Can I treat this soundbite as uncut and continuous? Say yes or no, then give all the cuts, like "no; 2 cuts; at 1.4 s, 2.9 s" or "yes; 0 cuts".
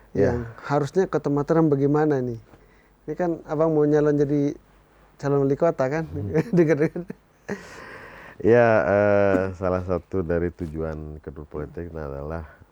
yes; 0 cuts